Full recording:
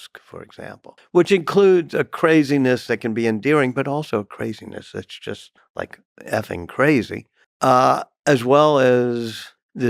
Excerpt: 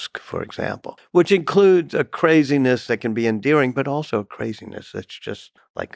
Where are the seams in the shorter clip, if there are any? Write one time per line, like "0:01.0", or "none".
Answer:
none